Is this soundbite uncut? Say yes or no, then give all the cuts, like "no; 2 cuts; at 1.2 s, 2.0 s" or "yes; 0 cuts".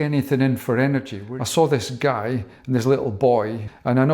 no; 1 cut; at 1.2 s